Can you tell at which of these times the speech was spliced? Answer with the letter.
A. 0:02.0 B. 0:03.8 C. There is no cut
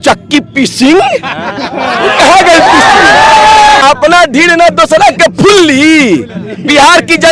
B